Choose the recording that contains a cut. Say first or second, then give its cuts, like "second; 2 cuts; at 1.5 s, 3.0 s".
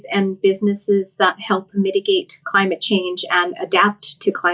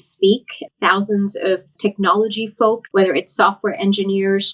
second; 2 cuts; at 1.7 s, 2.8 s